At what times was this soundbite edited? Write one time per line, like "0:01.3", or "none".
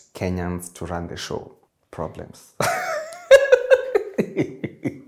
none